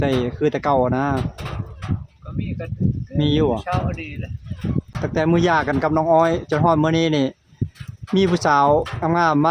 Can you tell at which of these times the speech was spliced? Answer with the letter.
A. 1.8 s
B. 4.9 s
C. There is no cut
B